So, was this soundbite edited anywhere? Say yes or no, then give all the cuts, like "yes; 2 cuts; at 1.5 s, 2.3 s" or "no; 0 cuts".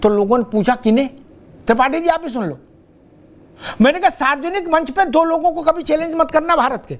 no; 0 cuts